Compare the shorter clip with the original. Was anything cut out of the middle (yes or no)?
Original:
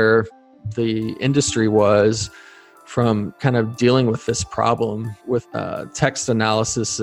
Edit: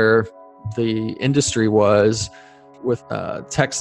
yes